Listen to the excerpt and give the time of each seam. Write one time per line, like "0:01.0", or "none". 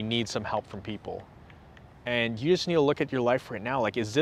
none

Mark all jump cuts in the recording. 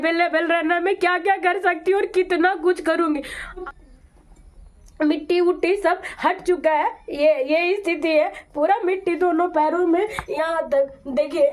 0:03.6

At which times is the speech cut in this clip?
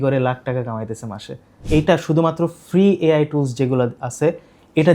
0:01.6

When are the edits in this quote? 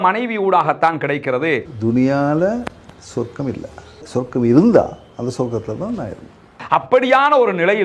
0:01.7
0:04.0

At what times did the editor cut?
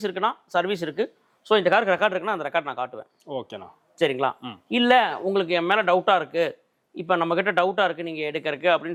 none

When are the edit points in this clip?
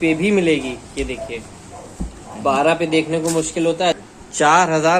0:04.0

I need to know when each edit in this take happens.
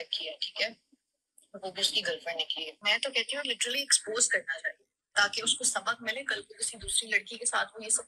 0:02.8

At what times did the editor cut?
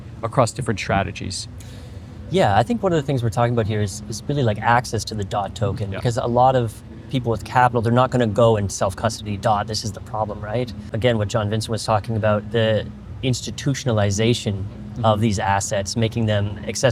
none

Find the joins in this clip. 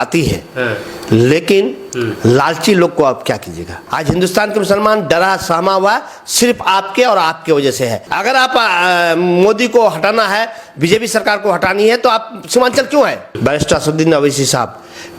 0:03.7
0:08.0
0:13.3

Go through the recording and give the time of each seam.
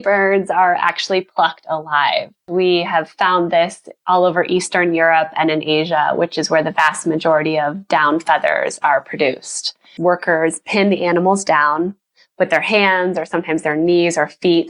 0:02.5
0:09.9

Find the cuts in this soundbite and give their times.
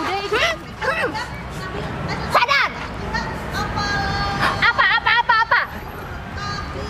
none

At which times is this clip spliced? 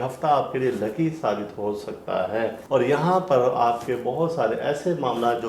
0:02.6

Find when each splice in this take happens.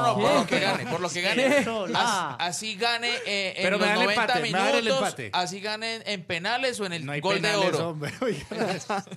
none

